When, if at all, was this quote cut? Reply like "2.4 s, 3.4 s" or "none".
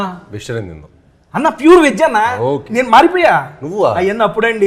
none